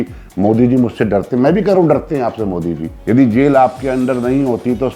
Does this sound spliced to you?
yes; 1 cut; at 2.9 s

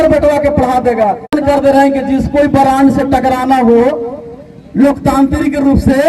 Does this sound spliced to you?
yes; 1 cut; at 1.3 s

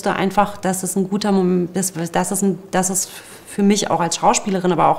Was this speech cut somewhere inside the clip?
no; 0 cuts

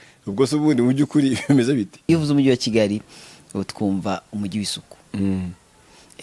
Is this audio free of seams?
no; 1 cut; at 2.1 s

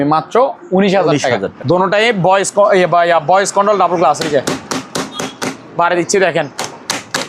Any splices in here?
yes; 1 cut; at 1.5 s

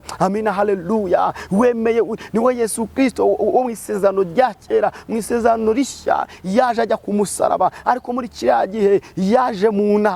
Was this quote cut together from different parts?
no; 0 cuts

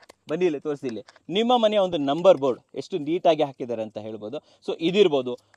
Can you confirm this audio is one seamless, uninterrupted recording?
yes; 0 cuts

